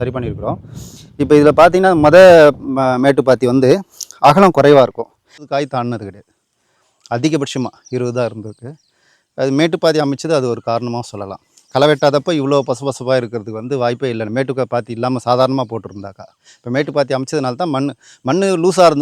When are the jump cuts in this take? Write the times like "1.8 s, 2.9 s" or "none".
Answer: 5.4 s